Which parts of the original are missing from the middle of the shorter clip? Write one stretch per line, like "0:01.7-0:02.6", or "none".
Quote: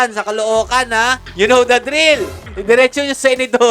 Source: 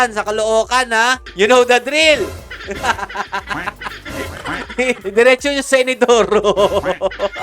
0:02.5-0:05.0